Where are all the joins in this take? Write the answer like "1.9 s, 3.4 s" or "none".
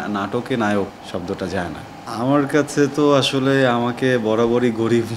1.0 s, 1.9 s